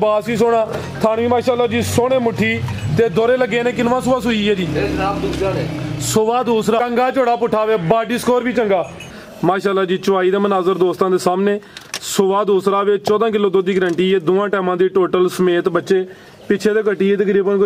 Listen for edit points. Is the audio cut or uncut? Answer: cut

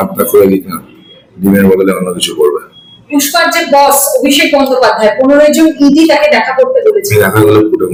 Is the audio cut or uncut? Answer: uncut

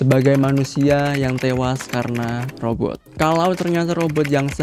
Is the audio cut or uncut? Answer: cut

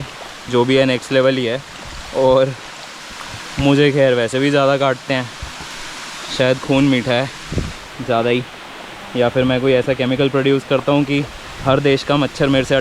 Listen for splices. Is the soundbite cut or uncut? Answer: uncut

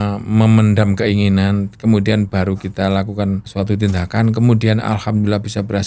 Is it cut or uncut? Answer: cut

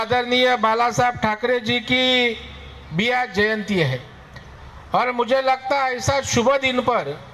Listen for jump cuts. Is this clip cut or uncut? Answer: uncut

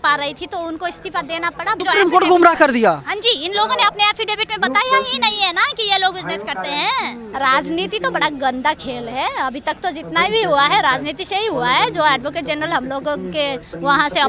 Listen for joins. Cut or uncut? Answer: cut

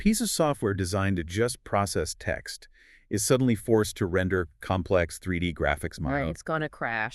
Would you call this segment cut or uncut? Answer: uncut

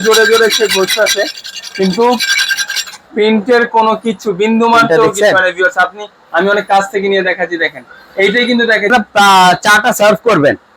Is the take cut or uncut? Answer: cut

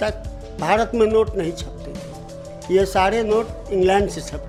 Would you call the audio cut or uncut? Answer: uncut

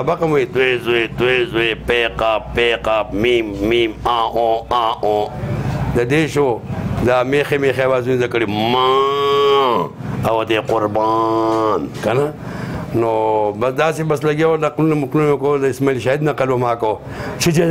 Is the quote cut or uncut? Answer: uncut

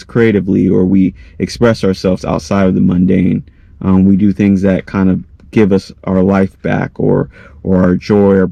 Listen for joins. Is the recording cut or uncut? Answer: uncut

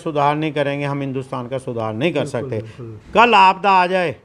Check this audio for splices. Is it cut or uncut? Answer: uncut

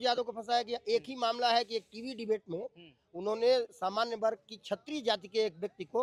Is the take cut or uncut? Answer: uncut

